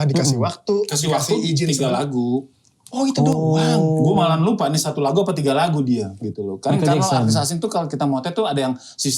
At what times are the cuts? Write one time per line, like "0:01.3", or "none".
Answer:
none